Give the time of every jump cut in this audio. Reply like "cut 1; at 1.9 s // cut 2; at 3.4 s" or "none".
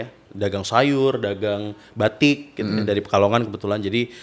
none